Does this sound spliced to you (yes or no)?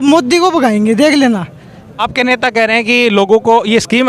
yes